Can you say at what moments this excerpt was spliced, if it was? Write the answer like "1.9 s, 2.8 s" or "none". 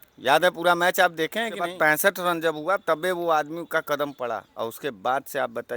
1.7 s